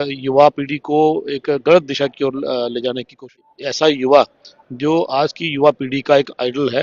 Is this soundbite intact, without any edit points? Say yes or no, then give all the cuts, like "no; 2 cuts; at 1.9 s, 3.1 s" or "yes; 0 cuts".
no; 1 cut; at 3.4 s